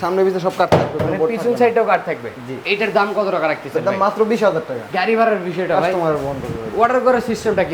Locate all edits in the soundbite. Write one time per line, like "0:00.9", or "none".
none

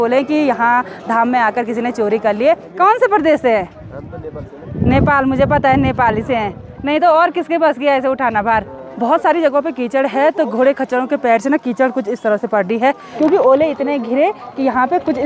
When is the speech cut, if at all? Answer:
0:02.7
0:08.8
0:13.1

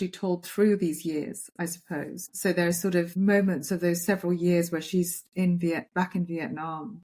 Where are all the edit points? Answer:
0:02.4
0:03.1

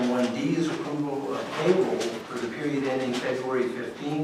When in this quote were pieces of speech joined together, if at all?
none

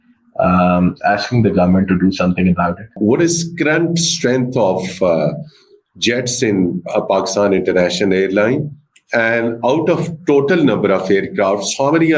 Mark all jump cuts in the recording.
0:02.9

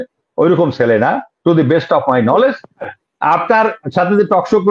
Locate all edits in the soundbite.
0:02.8

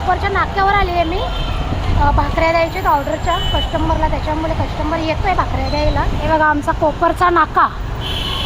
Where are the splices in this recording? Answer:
0:06.3

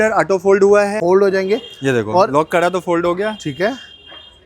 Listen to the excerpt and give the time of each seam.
0:01.0

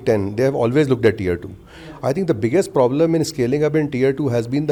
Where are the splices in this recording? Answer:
none

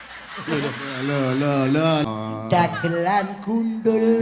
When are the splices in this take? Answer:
0:02.0

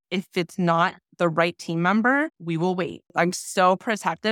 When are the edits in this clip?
0:02.8

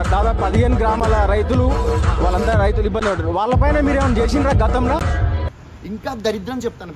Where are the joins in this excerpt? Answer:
0:05.5

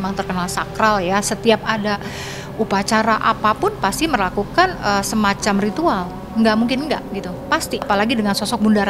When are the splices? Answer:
none

